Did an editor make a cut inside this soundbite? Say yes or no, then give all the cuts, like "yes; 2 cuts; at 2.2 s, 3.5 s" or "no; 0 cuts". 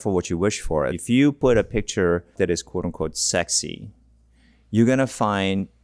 yes; 2 cuts; at 1.0 s, 2.3 s